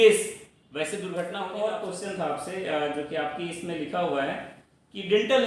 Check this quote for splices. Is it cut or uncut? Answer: cut